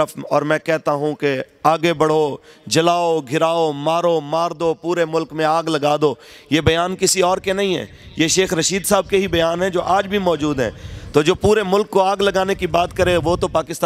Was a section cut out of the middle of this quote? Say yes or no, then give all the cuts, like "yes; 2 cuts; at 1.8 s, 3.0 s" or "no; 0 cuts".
no; 0 cuts